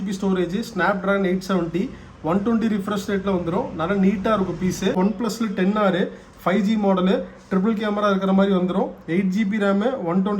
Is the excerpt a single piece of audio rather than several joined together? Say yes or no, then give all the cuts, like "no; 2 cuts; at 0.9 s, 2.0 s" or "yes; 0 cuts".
no; 1 cut; at 4.9 s